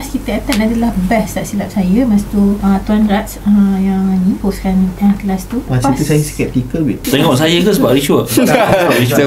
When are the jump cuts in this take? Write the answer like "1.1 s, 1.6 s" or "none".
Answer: 2.6 s, 4.4 s, 5.7 s, 7.0 s